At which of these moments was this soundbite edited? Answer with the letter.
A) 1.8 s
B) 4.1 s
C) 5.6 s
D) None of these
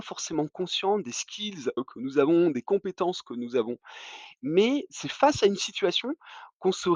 A